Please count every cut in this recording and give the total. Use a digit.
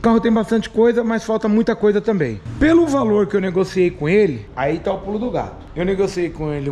0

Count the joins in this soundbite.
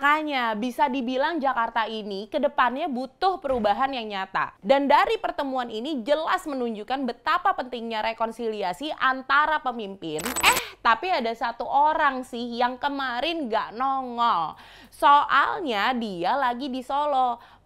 1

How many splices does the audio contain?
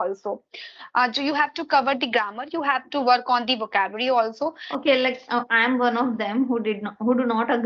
1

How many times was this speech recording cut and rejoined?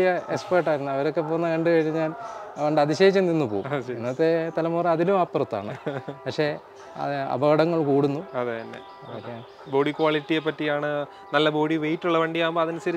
0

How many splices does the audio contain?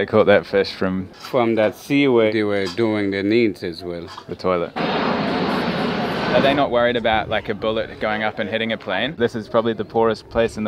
5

